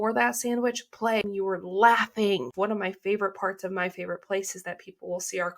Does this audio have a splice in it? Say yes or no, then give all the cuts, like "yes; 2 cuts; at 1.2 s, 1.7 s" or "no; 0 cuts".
yes; 2 cuts; at 1.2 s, 2.5 s